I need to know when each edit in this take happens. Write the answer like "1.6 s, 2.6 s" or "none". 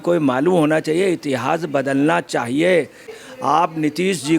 3.1 s